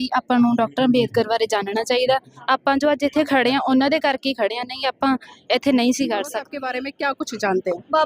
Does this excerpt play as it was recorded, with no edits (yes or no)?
no